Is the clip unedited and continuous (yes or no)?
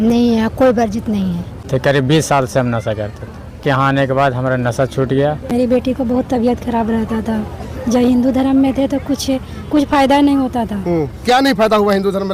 no